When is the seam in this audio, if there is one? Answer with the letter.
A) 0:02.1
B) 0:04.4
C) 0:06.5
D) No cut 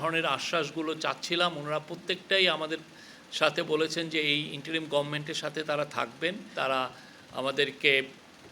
C